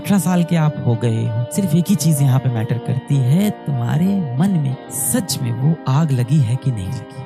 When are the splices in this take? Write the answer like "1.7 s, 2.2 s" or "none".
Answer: 1.4 s